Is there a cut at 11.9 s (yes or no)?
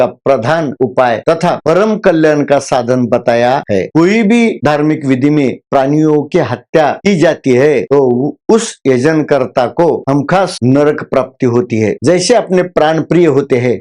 yes